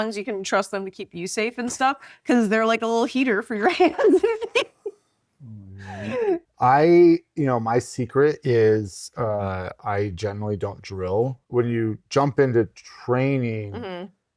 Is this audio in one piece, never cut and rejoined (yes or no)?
no